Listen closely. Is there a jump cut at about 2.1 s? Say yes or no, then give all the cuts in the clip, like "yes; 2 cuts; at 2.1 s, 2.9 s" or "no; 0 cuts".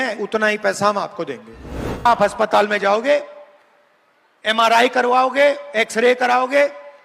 yes; 1 cut; at 2.1 s